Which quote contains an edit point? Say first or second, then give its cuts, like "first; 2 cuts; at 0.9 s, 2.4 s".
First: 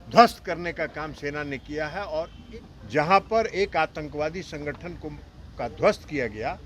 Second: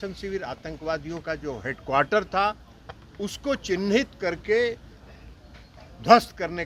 first; 1 cut; at 2.1 s